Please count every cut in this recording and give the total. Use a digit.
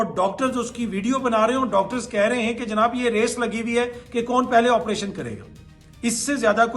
0